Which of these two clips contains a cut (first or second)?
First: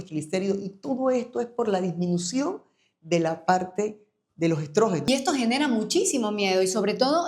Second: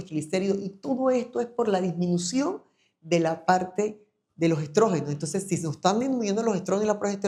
first